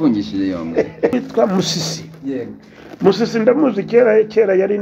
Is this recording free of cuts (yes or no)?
no